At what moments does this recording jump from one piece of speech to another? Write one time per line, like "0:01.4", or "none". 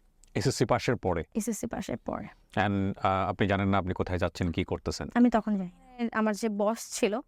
0:06.1